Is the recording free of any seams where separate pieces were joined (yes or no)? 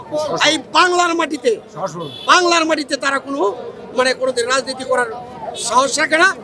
yes